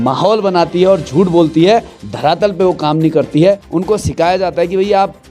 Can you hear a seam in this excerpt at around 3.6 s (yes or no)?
yes